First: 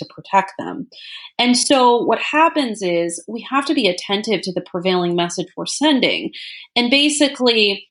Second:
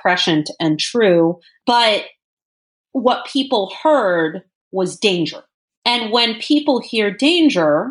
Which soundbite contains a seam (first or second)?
second